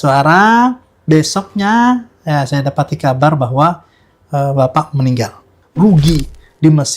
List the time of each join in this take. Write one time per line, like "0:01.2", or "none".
0:05.6